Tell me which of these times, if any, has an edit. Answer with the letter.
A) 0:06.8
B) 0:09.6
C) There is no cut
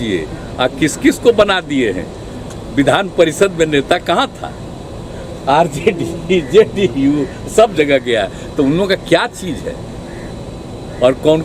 C